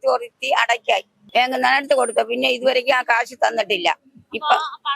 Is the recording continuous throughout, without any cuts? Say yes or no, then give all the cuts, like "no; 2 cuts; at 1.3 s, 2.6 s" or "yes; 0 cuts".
no; 1 cut; at 1.2 s